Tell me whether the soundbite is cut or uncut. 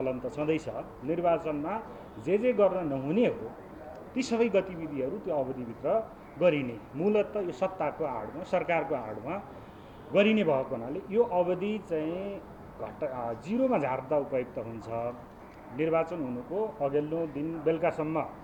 uncut